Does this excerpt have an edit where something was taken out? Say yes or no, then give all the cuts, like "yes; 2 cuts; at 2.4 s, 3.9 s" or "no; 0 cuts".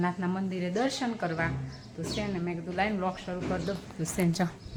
no; 0 cuts